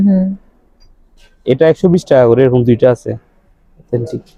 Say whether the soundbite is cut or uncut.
uncut